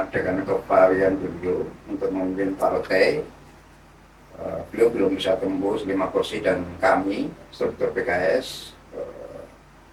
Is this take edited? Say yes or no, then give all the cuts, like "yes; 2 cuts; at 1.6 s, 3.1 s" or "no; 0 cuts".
no; 0 cuts